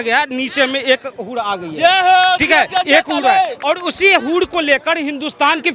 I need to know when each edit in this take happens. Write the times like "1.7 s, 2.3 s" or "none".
none